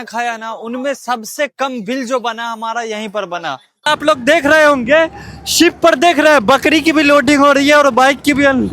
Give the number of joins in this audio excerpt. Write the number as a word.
one